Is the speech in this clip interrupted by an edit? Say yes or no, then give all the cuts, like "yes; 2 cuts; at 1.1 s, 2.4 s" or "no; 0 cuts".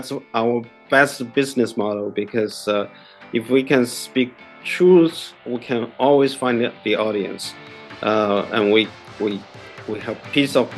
no; 0 cuts